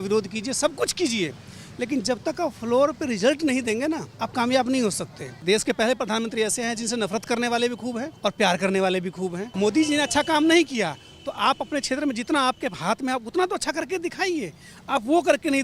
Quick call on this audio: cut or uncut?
cut